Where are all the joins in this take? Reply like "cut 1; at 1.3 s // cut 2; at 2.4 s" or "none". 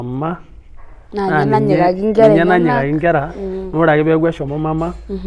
none